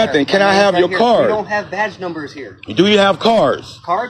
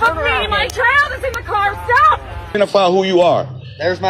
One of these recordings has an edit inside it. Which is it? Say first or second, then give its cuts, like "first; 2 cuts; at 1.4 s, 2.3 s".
second; 1 cut; at 2.6 s